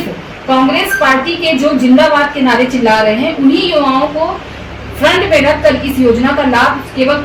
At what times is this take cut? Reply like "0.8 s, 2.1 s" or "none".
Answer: none